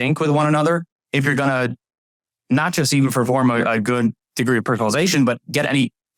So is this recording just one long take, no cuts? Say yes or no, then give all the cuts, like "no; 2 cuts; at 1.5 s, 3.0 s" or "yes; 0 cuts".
yes; 0 cuts